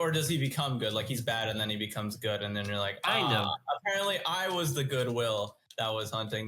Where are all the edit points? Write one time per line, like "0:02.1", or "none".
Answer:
none